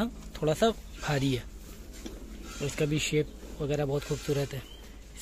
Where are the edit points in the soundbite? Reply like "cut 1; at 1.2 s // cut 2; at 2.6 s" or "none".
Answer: none